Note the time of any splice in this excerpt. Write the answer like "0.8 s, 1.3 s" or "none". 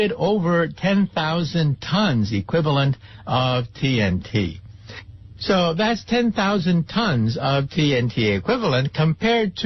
1.7 s

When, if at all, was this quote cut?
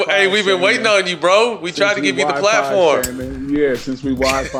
none

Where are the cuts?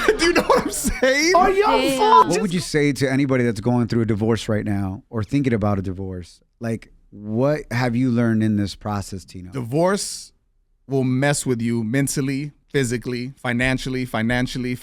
2.3 s

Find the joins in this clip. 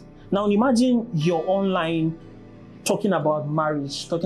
none

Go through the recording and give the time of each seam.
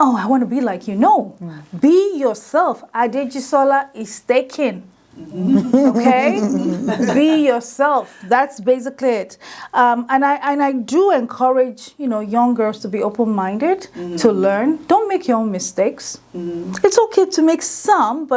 none

